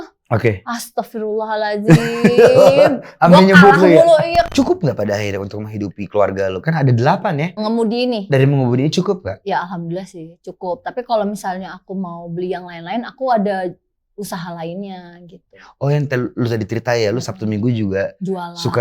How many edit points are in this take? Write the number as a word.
two